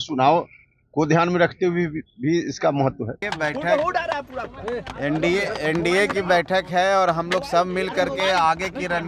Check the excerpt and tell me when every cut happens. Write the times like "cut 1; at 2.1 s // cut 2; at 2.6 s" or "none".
cut 1; at 3.2 s